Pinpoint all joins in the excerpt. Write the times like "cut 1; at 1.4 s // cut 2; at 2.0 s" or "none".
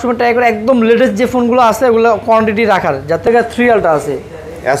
cut 1; at 3.3 s